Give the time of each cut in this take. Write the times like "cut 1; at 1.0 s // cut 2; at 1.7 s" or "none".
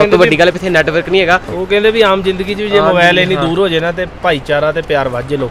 cut 1; at 1.5 s